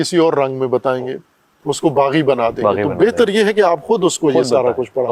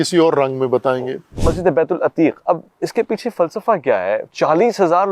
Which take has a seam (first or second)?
second